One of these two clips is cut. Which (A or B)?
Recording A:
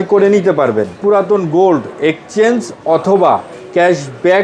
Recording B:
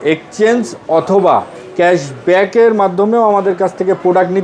A